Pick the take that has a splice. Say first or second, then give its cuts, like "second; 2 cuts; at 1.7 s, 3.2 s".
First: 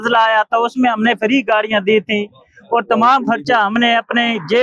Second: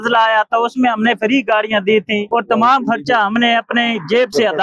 second; 1 cut; at 2.2 s